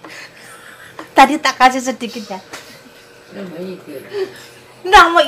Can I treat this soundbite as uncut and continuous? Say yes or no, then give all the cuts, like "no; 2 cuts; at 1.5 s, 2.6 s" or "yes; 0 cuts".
yes; 0 cuts